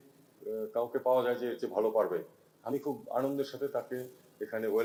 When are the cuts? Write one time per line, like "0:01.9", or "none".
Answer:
none